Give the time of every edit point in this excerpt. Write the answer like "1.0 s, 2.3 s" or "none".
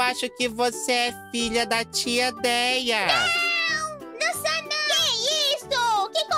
none